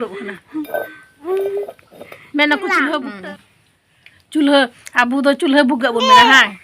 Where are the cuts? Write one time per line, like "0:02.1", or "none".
0:03.1